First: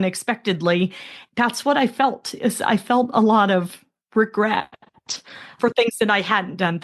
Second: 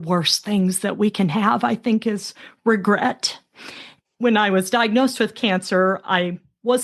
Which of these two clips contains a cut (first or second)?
first